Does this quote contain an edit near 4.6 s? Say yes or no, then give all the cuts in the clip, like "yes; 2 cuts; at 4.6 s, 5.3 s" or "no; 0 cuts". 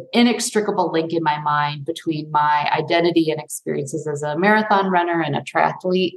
no; 0 cuts